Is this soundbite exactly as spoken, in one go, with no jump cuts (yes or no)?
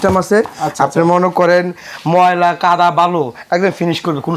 yes